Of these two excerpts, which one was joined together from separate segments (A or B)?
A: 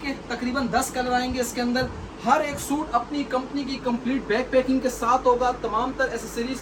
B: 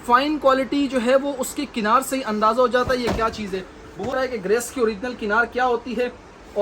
B